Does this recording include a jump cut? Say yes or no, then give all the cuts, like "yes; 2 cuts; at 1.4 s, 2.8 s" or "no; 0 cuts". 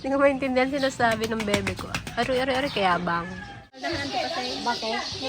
yes; 1 cut; at 3.8 s